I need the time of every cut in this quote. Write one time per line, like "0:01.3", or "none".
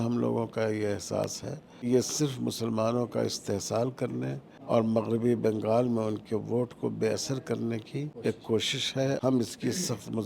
0:01.9
0:04.5
0:08.1
0:09.2